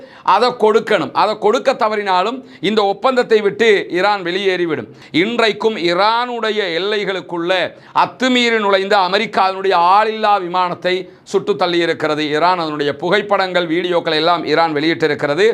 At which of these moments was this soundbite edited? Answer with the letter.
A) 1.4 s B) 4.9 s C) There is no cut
B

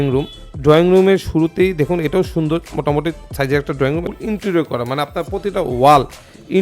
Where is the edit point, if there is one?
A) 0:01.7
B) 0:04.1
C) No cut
B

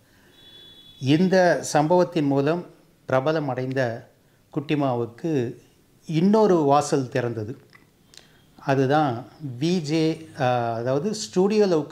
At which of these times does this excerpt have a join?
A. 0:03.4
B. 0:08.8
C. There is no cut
C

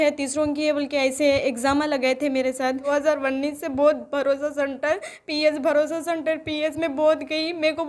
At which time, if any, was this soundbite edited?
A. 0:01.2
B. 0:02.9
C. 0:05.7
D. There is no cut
B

